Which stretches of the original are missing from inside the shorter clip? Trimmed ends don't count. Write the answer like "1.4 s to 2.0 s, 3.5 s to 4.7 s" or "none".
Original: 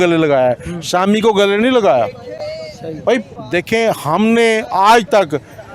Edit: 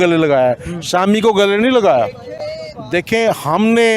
2.7 s to 3.3 s